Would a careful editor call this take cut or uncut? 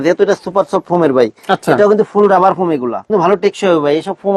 cut